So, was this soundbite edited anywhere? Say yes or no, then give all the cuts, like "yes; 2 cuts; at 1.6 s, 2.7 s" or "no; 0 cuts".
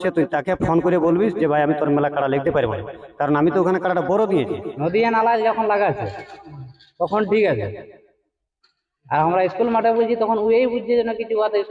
yes; 1 cut; at 4.7 s